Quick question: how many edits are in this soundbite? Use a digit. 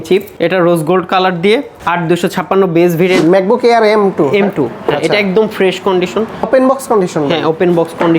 1